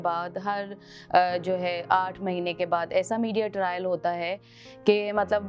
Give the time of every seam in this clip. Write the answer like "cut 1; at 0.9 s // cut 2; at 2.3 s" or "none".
none